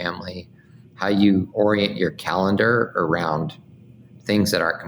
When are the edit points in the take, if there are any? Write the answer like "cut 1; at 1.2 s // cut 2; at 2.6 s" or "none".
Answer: cut 1; at 1.5 s